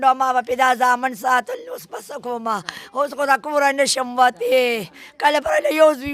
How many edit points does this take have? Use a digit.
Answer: 0